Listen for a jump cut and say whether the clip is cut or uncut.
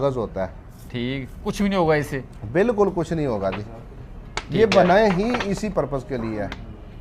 uncut